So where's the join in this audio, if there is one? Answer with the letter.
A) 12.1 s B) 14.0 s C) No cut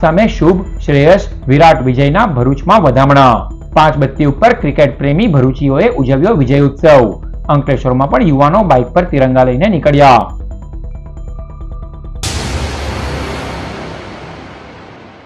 A